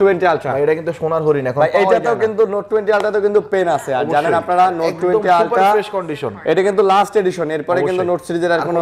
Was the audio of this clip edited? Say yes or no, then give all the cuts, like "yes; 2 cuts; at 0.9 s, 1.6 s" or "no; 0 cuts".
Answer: no; 0 cuts